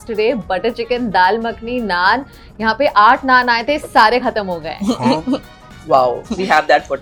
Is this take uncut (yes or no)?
yes